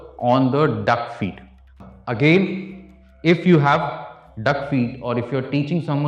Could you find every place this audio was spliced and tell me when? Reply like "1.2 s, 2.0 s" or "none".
1.7 s